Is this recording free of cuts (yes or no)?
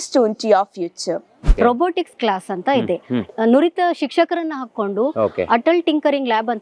no